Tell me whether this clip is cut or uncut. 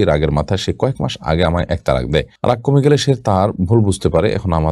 uncut